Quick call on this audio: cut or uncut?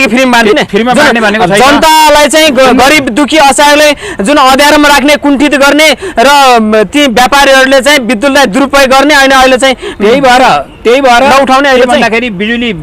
uncut